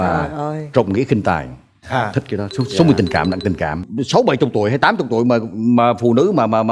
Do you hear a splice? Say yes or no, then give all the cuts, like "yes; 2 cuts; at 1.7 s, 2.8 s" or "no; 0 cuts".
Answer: yes; 1 cut; at 3.8 s